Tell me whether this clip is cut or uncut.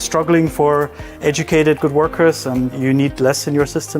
cut